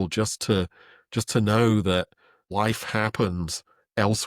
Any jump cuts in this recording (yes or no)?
yes